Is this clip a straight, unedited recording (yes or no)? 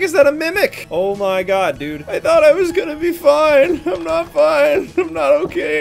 yes